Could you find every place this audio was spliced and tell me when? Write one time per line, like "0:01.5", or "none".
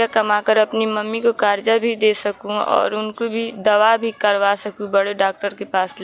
none